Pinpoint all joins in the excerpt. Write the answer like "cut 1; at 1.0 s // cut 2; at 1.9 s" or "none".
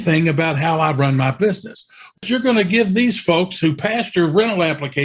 cut 1; at 2.2 s